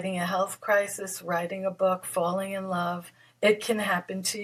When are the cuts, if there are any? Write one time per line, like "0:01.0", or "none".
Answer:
none